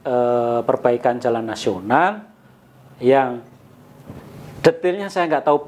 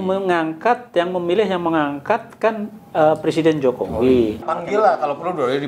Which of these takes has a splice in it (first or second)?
second